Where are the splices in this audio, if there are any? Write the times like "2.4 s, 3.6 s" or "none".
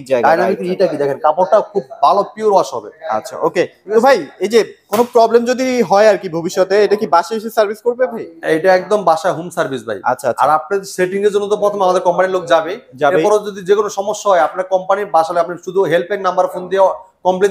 none